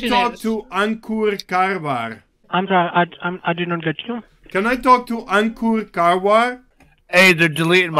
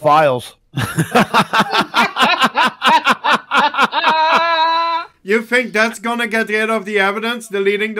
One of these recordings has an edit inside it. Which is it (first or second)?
first